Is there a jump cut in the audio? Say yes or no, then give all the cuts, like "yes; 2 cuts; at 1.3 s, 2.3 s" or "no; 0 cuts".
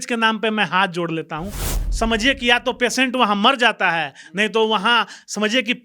yes; 1 cut; at 1.7 s